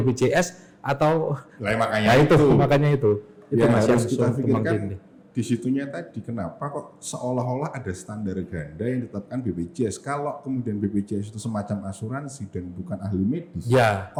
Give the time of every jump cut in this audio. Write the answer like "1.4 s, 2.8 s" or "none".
none